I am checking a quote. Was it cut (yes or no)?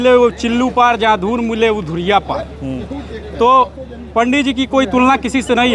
no